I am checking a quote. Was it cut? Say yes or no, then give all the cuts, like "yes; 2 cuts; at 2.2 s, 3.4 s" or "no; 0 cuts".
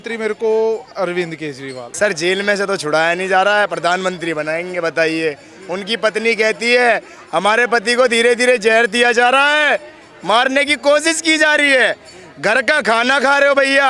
yes; 1 cut; at 1.9 s